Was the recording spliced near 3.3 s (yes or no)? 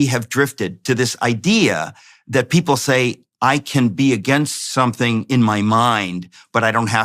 no